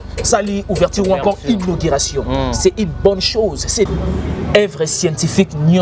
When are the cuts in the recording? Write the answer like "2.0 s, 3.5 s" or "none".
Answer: 3.9 s